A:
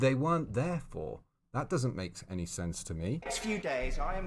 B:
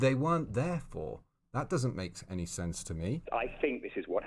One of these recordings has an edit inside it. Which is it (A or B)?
A